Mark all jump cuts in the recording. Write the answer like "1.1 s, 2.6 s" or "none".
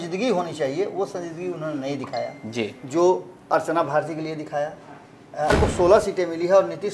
5.5 s